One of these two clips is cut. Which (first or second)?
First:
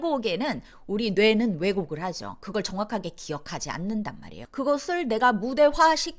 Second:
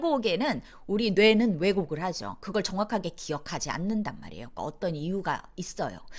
first